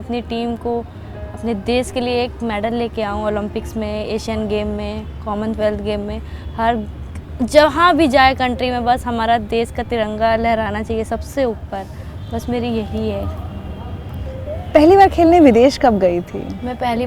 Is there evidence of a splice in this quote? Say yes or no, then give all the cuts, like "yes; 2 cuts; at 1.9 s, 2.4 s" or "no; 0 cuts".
no; 0 cuts